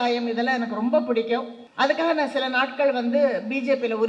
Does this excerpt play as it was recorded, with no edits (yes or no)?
no